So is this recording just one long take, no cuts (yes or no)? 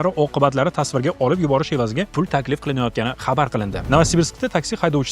no